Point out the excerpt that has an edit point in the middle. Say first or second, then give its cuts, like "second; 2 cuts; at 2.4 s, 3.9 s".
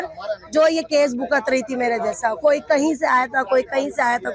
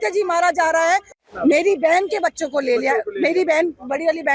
second; 1 cut; at 1.1 s